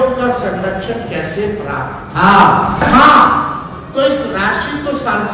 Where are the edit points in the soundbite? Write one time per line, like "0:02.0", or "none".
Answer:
0:02.8